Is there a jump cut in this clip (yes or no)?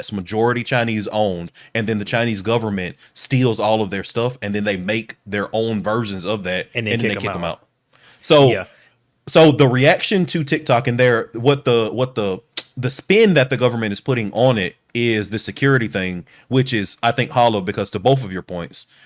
no